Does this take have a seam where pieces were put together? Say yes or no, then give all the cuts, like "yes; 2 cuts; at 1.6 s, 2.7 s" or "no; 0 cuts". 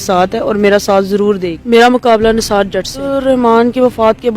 yes; 2 cuts; at 1.5 s, 3.1 s